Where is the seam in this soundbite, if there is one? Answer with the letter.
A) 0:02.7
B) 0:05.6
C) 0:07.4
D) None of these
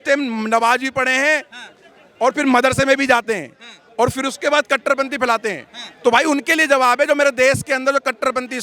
D